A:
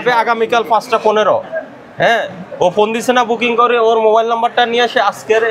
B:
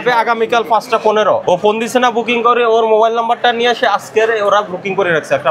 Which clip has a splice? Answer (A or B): B